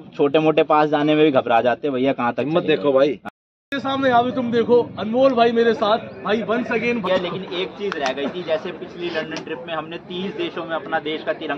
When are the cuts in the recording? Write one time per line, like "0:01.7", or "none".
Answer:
0:03.3
0:07.1